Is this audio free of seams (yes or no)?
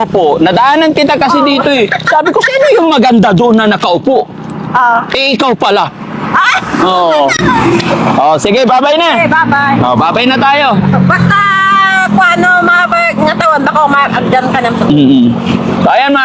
yes